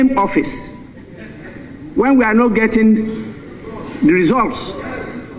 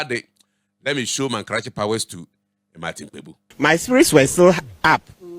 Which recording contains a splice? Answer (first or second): second